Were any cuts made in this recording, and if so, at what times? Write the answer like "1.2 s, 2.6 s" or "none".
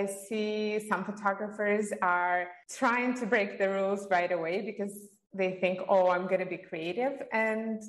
2.6 s